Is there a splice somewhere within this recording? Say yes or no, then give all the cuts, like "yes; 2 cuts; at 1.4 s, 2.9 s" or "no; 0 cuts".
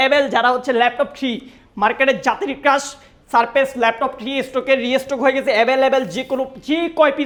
no; 0 cuts